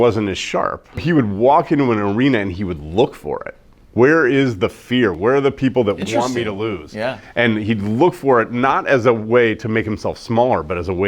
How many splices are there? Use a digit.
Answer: 2